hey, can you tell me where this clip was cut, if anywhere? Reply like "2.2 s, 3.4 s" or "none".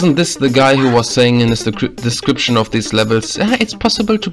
none